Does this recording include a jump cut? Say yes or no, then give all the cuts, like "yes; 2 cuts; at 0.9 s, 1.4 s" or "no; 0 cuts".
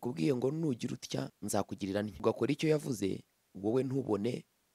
yes; 2 cuts; at 1.4 s, 2.2 s